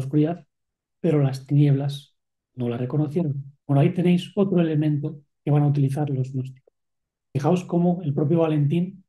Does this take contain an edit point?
yes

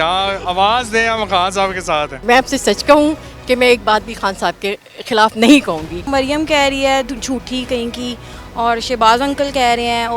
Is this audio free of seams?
no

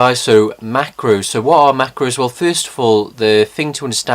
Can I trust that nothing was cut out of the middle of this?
no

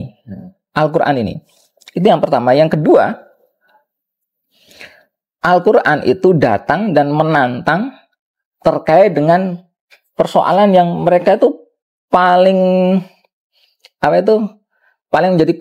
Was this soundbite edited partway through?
no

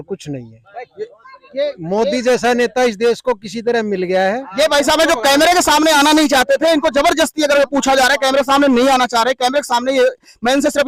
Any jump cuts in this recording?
no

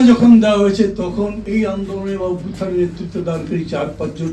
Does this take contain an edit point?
yes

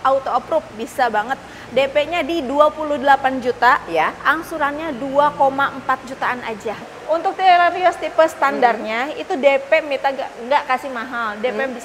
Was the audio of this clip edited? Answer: yes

